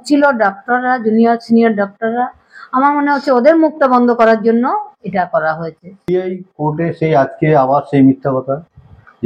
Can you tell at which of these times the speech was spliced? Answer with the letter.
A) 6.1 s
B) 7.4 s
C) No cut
A